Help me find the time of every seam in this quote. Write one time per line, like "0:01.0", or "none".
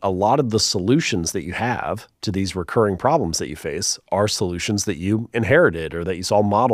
none